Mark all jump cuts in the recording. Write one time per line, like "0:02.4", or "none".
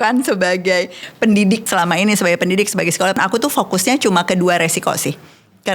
0:01.7
0:03.2